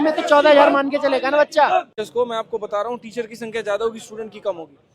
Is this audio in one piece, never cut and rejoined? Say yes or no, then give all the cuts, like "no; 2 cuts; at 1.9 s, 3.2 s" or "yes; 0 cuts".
no; 1 cut; at 2.0 s